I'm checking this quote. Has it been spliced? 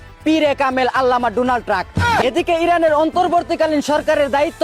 yes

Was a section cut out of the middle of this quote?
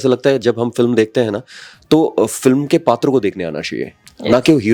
no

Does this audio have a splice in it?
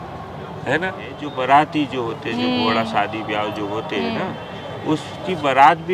yes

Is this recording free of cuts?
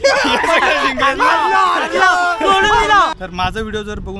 no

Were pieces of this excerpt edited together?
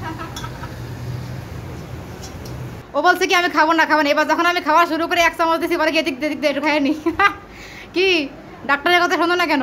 yes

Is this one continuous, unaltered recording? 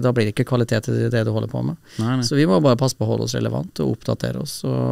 yes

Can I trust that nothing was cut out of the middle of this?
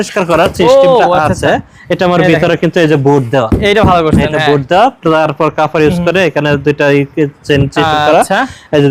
yes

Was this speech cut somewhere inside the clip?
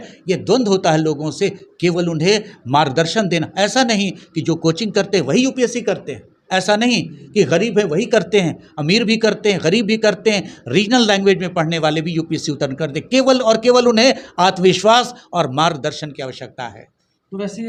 no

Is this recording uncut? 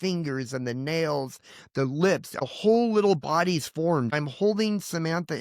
no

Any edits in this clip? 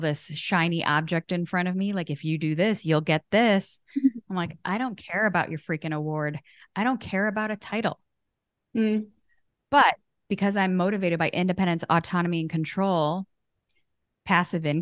no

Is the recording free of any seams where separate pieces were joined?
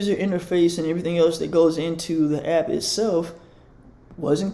yes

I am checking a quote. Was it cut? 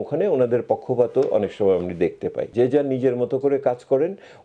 yes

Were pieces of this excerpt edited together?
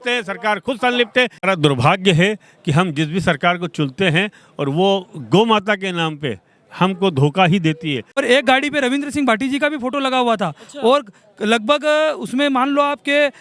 yes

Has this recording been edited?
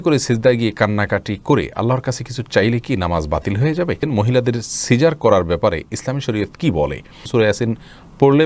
yes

